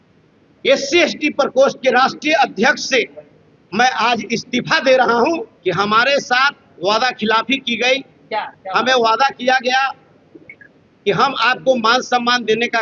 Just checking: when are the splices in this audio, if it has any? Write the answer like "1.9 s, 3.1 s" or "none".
5.5 s